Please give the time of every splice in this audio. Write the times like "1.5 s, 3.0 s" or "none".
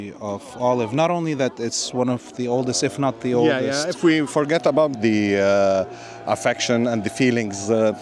4.9 s